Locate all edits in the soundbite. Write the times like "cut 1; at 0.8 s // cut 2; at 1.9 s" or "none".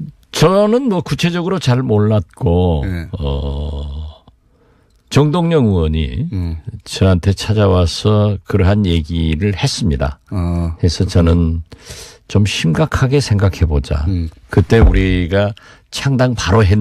cut 1; at 11.0 s